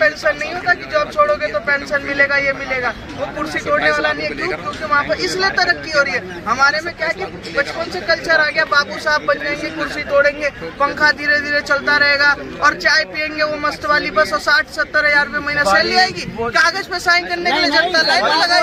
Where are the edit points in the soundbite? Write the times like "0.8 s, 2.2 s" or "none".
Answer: none